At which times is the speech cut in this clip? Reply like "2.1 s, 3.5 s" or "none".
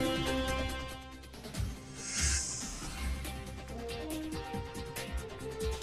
2.3 s